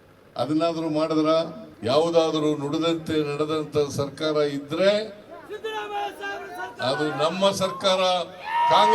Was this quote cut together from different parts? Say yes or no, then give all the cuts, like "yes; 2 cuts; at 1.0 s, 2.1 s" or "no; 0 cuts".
yes; 1 cut; at 1.7 s